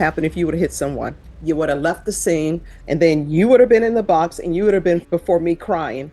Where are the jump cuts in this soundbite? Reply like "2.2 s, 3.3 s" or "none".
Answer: 1.3 s, 2.7 s, 5.0 s